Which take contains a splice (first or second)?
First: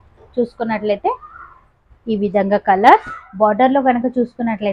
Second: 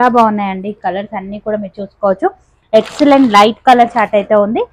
first